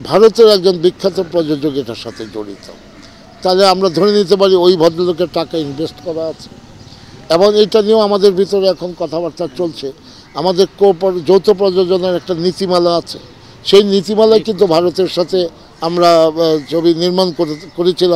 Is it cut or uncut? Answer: uncut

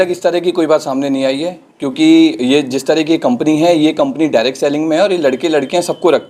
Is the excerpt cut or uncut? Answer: uncut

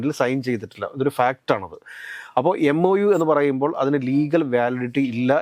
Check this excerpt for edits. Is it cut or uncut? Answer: uncut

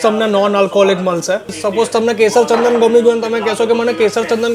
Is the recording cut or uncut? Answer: cut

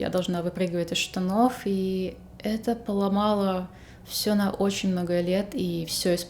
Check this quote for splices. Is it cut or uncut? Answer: uncut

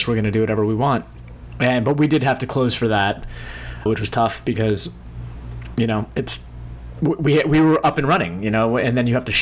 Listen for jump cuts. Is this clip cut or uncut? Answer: uncut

